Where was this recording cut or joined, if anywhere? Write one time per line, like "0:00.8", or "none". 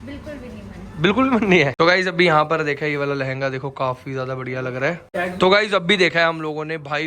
0:01.7
0:05.0